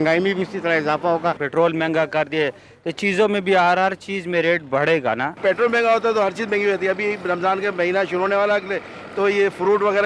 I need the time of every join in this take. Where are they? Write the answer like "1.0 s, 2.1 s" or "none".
1.4 s, 5.4 s